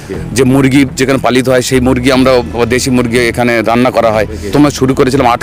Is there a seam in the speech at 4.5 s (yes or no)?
yes